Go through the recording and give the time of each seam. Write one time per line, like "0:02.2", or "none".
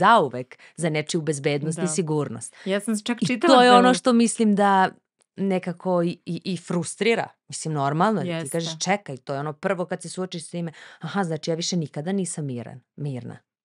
none